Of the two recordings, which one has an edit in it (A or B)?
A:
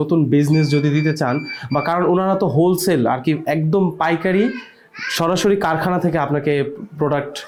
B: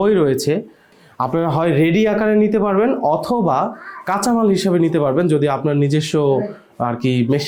B